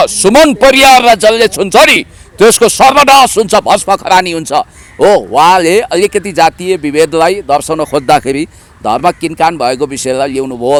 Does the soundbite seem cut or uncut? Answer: uncut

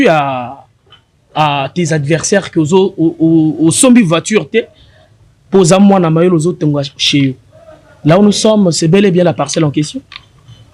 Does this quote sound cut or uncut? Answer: uncut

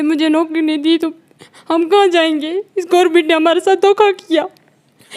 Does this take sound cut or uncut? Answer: uncut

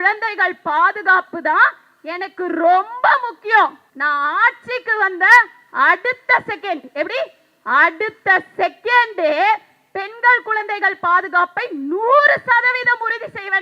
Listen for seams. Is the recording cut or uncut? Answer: cut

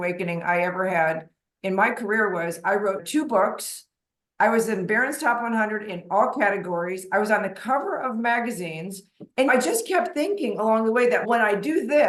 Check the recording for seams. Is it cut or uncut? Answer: uncut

